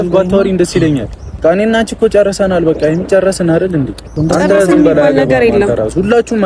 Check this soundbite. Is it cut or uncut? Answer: cut